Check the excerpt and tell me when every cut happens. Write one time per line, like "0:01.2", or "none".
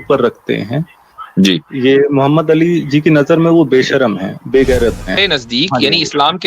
0:05.2